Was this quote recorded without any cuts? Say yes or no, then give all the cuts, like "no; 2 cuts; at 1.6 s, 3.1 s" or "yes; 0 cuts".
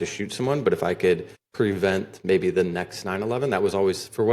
no; 1 cut; at 1.4 s